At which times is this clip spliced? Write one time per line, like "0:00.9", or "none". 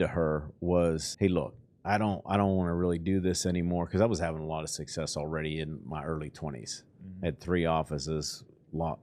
0:01.1